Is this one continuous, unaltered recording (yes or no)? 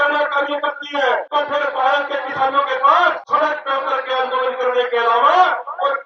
no